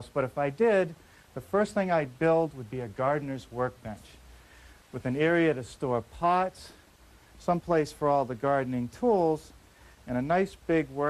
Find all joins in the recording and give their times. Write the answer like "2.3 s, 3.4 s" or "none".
8.3 s